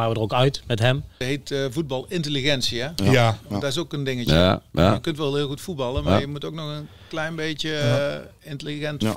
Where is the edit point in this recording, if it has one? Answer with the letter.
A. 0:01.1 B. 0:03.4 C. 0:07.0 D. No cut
A